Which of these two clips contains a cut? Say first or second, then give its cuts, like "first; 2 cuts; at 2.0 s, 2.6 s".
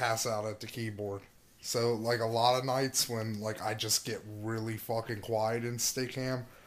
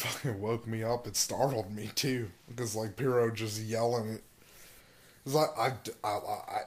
second; 1 cut; at 5.2 s